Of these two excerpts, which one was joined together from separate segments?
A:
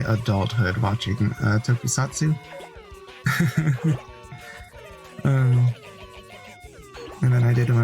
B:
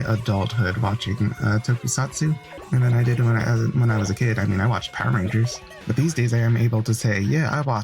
B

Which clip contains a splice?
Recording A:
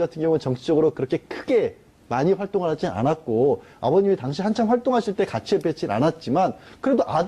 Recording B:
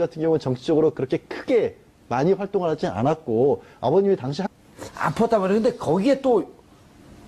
A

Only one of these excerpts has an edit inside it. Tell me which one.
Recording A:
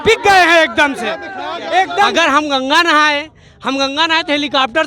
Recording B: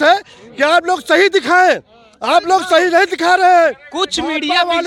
A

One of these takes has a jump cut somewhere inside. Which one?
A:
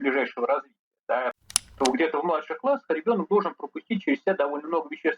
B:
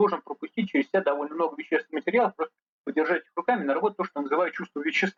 A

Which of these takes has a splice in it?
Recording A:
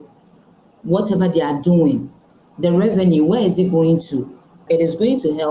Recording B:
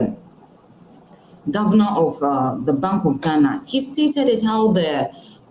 A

